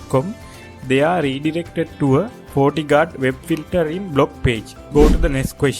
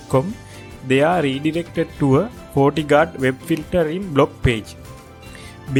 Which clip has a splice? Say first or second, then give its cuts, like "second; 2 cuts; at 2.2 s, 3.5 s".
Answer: first; 1 cut; at 4.8 s